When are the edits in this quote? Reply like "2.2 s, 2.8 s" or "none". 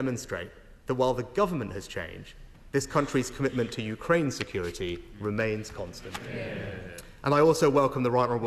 6.3 s